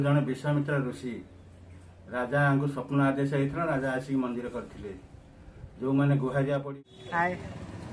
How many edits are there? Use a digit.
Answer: 1